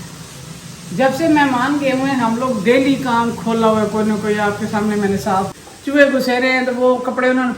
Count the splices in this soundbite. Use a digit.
1